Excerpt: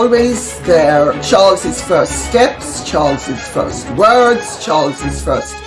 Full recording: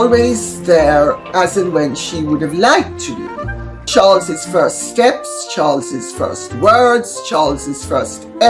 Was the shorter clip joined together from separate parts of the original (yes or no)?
yes